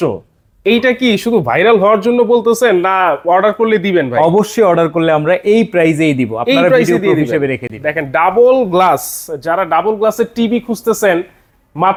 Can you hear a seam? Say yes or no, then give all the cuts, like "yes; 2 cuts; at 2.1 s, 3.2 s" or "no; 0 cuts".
no; 0 cuts